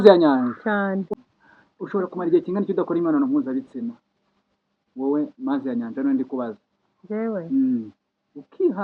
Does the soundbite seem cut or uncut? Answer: cut